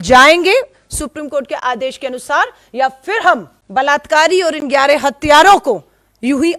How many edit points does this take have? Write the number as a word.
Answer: one